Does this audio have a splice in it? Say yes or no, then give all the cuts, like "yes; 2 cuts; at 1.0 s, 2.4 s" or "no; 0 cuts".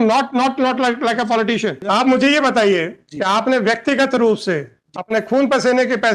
yes; 1 cut; at 1.8 s